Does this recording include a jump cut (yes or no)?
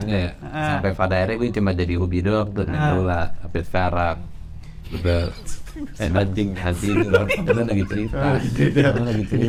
no